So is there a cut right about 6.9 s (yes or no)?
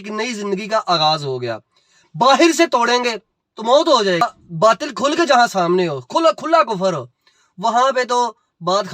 no